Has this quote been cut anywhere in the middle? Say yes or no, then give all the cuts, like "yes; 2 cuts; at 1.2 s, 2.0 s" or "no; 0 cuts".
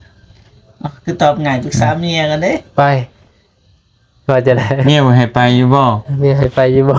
no; 0 cuts